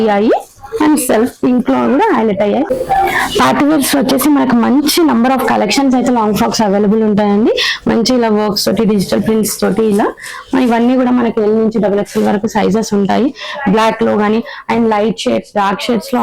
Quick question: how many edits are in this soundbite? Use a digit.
1